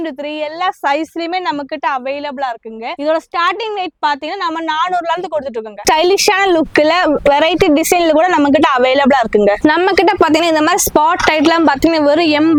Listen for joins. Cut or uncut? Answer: uncut